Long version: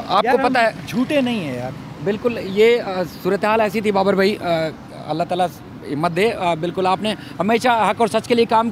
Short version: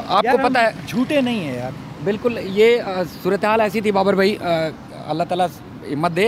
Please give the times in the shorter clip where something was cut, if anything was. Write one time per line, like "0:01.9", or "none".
none